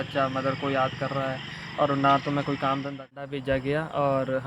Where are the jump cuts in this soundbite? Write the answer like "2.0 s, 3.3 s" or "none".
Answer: 3.3 s